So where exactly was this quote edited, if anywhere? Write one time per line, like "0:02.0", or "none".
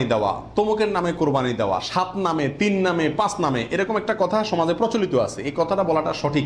none